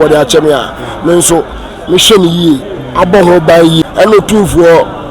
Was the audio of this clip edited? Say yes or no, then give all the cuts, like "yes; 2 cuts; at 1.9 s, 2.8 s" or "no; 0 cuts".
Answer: yes; 1 cut; at 3.8 s